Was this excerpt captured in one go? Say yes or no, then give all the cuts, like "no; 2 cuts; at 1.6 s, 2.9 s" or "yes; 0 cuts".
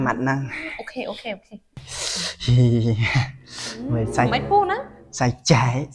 no; 1 cut; at 1.8 s